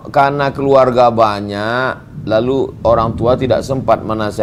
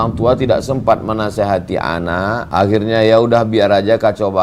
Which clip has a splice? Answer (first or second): second